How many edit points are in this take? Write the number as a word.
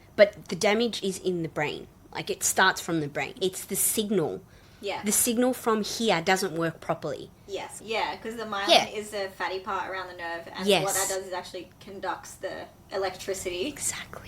two